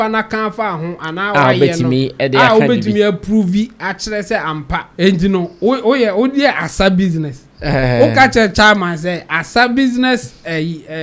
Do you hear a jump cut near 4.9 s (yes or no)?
yes